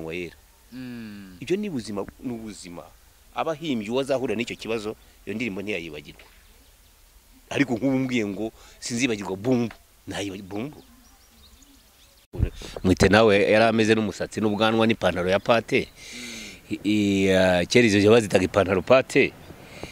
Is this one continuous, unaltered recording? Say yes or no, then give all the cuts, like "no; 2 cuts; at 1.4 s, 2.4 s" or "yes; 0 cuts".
no; 2 cuts; at 9.9 s, 12.3 s